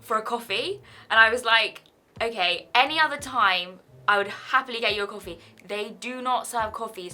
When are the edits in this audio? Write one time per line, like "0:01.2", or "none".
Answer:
none